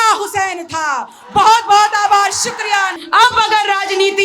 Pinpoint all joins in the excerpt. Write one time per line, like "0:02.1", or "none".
0:02.9